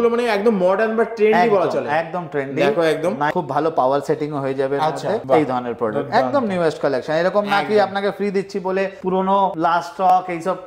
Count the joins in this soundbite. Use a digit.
1